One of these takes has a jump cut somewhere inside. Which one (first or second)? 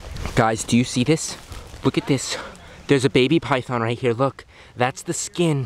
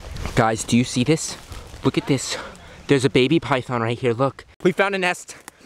second